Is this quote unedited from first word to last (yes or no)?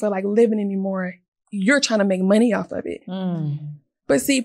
yes